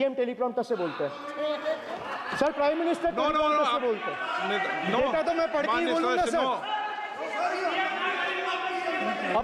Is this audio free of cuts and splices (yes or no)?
yes